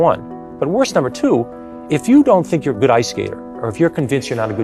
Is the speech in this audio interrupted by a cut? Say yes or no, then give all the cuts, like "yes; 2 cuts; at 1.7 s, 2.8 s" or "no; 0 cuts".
no; 0 cuts